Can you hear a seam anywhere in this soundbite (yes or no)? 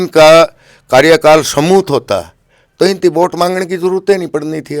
no